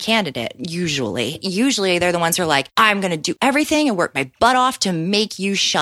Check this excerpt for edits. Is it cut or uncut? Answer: cut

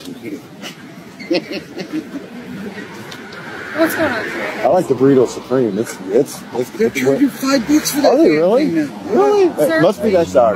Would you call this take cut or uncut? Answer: uncut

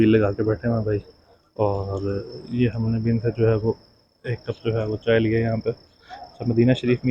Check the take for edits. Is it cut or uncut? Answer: uncut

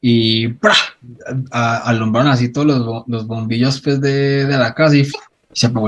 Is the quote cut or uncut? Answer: uncut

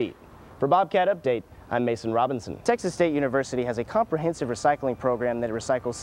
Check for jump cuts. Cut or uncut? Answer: cut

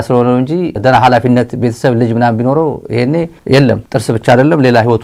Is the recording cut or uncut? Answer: uncut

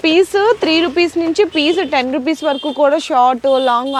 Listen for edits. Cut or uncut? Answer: uncut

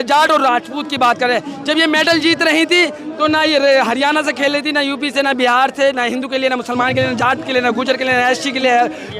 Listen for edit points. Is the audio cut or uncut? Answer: uncut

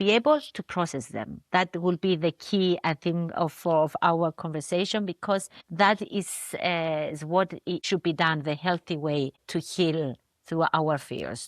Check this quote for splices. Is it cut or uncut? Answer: cut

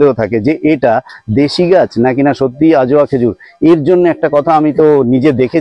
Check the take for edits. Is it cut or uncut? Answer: uncut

